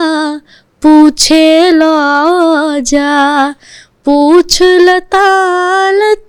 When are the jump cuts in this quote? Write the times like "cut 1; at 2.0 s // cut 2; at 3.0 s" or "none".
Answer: none